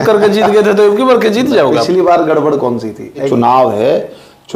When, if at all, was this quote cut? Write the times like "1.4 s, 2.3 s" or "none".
3.3 s